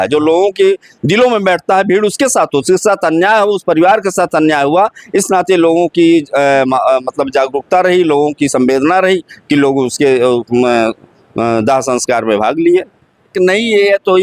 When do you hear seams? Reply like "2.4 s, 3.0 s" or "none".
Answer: 13.3 s